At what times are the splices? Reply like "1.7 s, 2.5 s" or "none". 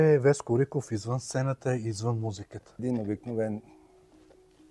2.8 s